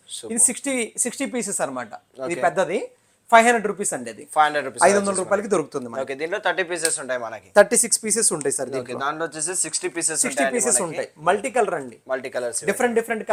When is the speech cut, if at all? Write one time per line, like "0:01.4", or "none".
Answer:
none

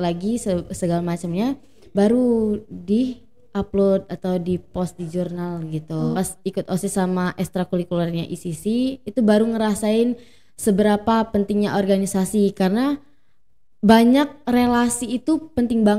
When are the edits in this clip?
0:06.1

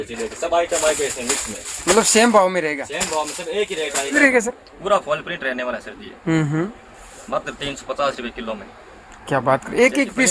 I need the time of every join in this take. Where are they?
0:04.2

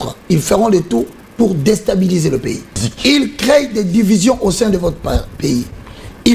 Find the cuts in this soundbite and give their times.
0:02.9

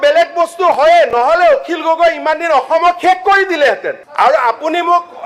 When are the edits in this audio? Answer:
0:04.0

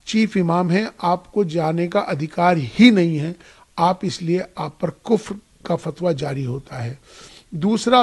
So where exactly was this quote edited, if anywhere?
none

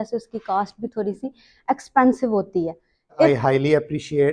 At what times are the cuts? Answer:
0:03.3

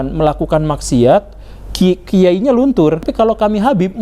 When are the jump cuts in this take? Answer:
0:03.1

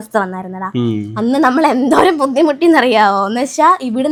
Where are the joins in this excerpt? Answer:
none

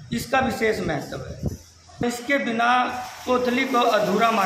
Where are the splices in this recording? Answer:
0:02.0

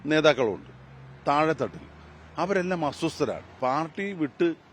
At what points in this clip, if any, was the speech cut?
0:03.5

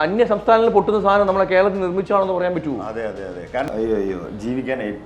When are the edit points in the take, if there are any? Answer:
0:03.7

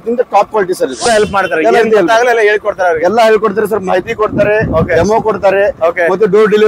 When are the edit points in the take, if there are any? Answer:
0:01.0

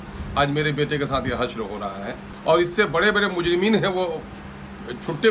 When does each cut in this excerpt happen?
0:02.2

